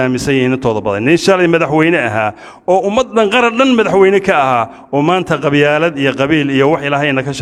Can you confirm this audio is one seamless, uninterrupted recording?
yes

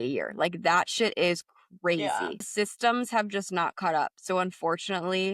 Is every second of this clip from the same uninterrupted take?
no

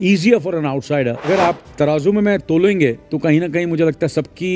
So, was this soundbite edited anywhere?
yes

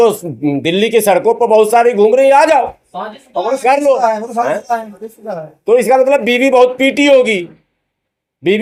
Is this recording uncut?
yes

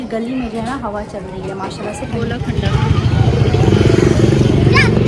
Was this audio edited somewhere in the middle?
yes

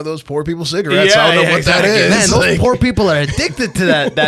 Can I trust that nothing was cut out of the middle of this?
yes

